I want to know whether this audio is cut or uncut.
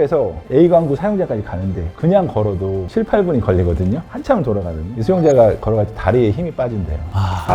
uncut